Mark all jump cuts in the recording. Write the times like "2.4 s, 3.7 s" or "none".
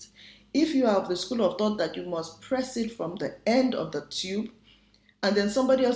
none

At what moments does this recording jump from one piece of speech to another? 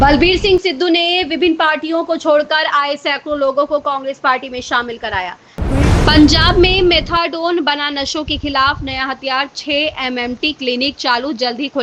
5.5 s

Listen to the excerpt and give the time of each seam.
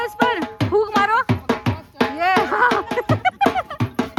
none

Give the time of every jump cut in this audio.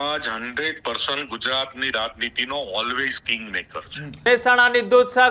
4.2 s

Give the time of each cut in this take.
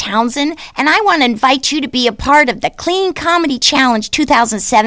none

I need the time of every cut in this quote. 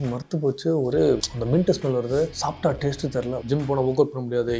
1.3 s, 2.3 s, 3.4 s

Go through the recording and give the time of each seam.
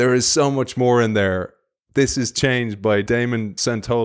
3.1 s

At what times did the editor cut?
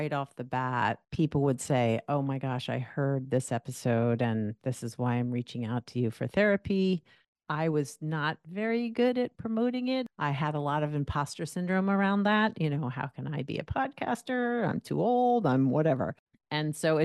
1.1 s, 10.1 s

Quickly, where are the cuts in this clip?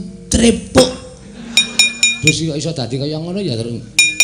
2.1 s

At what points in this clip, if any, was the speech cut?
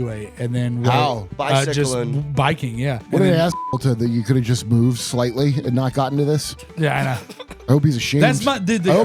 1.3 s, 3.0 s

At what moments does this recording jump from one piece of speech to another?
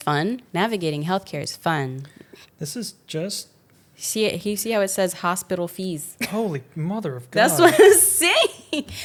none

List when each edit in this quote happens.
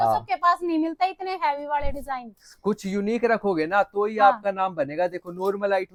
none

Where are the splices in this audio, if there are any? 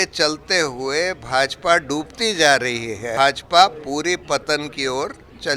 3.1 s

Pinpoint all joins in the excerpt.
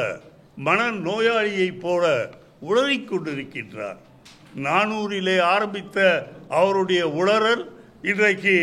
none

